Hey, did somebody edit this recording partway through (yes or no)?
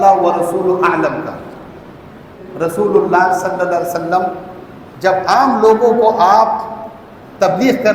yes